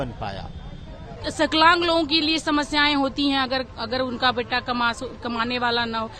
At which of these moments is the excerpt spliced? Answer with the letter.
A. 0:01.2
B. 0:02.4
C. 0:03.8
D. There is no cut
A